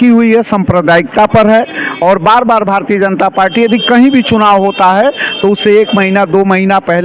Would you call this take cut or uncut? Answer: uncut